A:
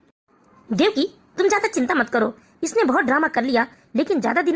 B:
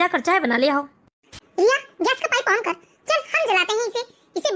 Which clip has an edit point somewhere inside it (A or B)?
B